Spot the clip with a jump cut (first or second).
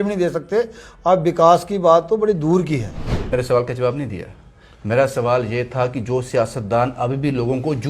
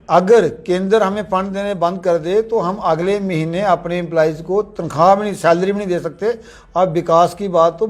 first